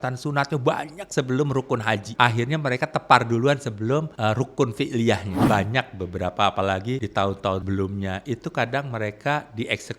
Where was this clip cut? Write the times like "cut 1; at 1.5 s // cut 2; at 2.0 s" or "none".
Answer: cut 1; at 2.1 s // cut 2; at 4.1 s // cut 3; at 5.3 s // cut 4; at 7.4 s